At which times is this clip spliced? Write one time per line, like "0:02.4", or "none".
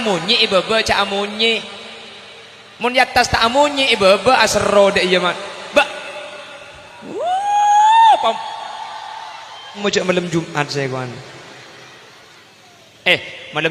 0:09.8